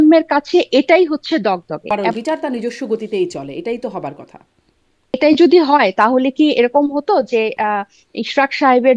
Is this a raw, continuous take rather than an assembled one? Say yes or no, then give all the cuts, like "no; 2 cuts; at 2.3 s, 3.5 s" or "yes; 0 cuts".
no; 2 cuts; at 1.9 s, 5.1 s